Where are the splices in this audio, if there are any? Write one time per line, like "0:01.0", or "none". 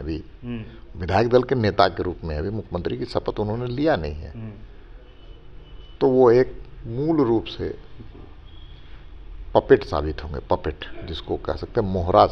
none